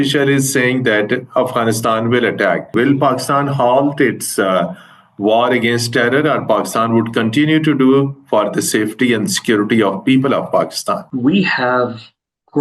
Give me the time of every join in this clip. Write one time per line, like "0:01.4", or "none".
0:02.7
0:11.1

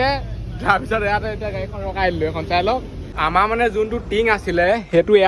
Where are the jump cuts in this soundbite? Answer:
0:03.0

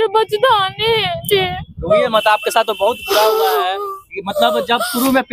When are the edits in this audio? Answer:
none

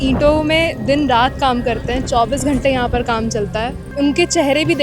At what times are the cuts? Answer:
0:03.8

